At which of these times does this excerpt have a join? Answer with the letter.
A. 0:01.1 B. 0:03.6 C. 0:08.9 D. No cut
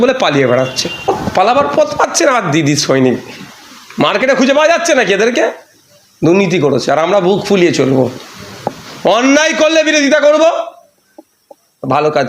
A